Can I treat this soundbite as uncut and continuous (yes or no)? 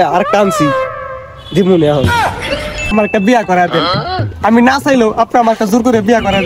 no